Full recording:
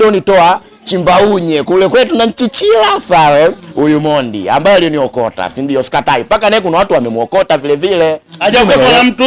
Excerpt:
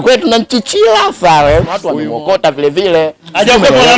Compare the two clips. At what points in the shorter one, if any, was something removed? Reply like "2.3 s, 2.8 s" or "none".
1.8 s